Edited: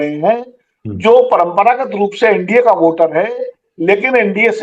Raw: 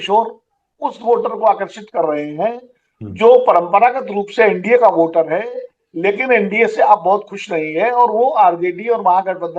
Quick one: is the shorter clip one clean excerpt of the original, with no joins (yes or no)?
yes